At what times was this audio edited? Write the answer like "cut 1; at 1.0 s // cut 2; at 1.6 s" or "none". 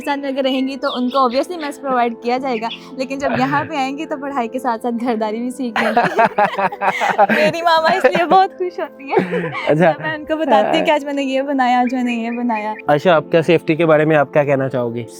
cut 1; at 12.7 s